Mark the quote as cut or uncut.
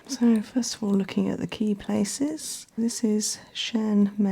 cut